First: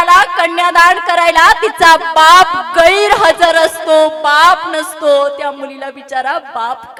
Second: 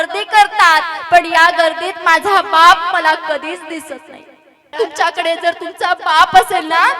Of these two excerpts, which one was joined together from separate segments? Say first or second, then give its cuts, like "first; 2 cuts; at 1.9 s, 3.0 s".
second; 1 cut; at 4.7 s